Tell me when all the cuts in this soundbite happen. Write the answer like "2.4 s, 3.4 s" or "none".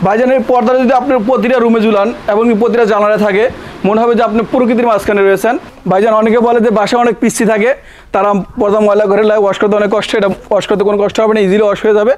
5.7 s